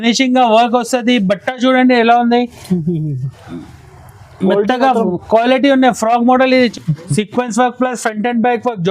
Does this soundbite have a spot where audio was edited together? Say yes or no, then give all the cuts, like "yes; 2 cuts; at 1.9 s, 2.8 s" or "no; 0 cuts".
yes; 1 cut; at 6.7 s